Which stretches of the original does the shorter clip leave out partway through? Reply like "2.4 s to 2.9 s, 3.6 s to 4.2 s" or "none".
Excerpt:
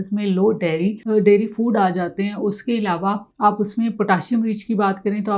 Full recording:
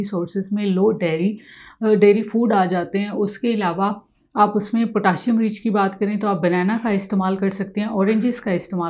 1.4 s to 1.8 s, 4.0 s to 4.2 s

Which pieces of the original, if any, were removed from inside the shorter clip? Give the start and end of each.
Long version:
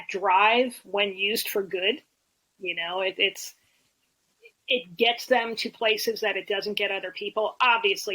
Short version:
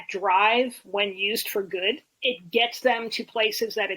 2.1 s to 4.5 s

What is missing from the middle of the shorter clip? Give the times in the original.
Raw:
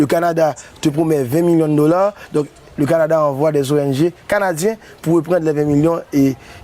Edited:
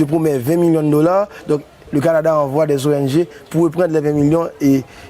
4.2 s to 4.9 s

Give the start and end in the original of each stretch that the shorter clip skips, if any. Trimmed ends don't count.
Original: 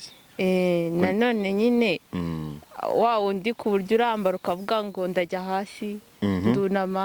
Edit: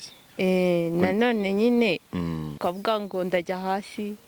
2.6 s to 4.4 s

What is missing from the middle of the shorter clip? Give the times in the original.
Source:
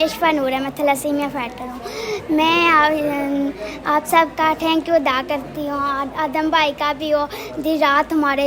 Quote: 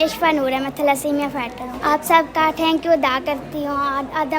1.7 s to 3.7 s

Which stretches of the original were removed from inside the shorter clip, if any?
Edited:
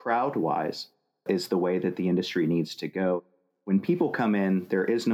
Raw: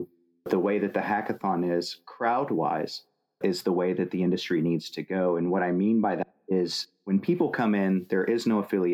5.4 s to 6.6 s

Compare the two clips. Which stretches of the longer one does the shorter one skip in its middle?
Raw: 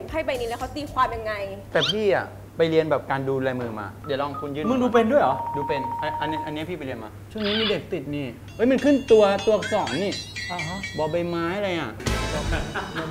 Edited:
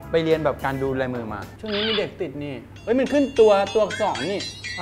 3.9 s to 7.1 s

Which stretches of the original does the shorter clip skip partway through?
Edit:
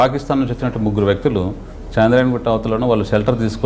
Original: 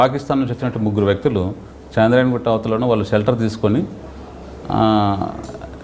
none

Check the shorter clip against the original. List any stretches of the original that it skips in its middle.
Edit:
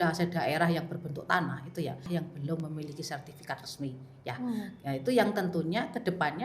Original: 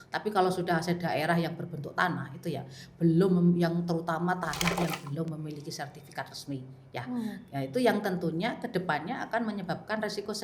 2.9 s to 4.9 s

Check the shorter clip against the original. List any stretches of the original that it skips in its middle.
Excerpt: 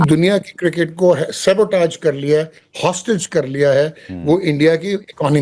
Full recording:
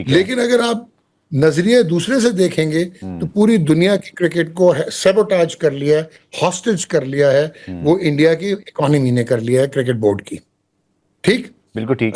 none

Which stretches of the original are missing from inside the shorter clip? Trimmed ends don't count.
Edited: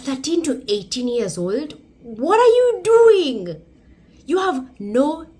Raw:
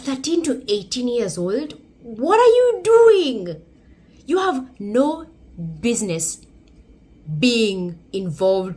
none

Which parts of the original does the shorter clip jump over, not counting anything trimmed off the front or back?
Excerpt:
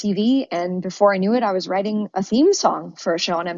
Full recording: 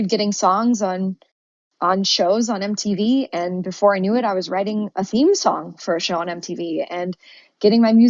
none

